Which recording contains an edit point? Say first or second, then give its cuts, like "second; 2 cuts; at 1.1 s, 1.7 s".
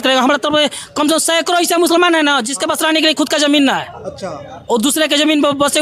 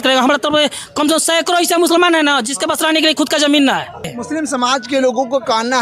second; 1 cut; at 4.2 s